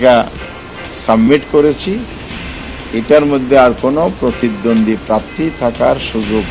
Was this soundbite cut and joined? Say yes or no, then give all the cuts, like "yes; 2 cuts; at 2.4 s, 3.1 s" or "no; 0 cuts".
no; 0 cuts